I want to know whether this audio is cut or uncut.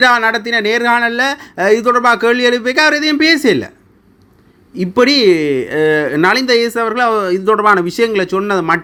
uncut